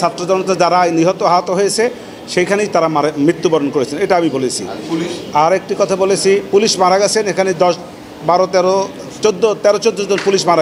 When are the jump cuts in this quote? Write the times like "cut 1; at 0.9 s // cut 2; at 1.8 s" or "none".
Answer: none

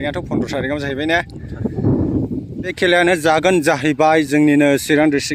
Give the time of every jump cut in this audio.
cut 1; at 2.7 s

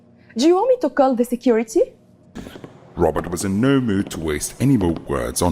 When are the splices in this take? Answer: cut 1; at 2.4 s

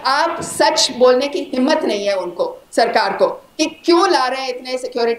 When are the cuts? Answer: none

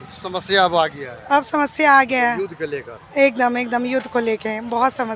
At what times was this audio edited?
none

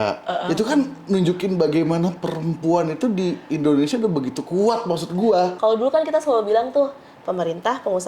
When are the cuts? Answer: cut 1; at 5.5 s

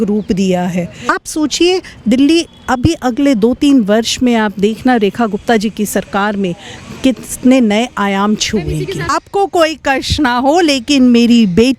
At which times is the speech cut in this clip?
cut 1; at 1.0 s // cut 2; at 9.1 s

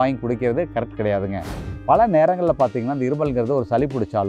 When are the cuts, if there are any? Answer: cut 1; at 1.6 s

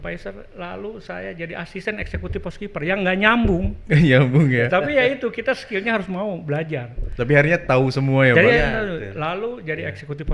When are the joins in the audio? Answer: none

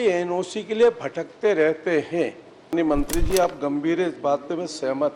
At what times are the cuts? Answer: cut 1; at 2.7 s

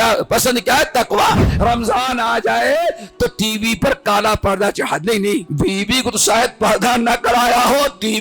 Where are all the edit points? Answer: cut 1; at 1.5 s // cut 2; at 5.5 s

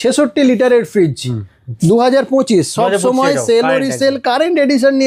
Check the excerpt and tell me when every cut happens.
none

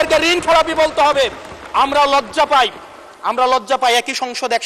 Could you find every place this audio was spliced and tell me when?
none

